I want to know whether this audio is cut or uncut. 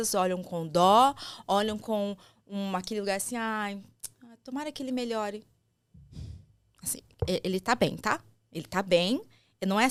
uncut